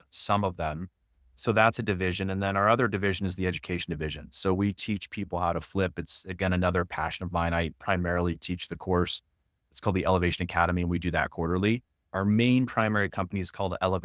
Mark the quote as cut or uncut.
cut